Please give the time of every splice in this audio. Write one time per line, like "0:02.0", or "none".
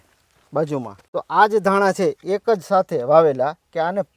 0:01.0